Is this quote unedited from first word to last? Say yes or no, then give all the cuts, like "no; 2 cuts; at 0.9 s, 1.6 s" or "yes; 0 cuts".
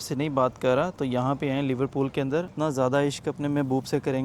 no; 1 cut; at 2.5 s